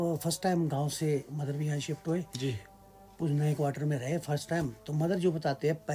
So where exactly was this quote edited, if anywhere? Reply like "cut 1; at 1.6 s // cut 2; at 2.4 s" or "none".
none